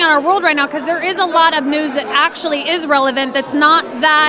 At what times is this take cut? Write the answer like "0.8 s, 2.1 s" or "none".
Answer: none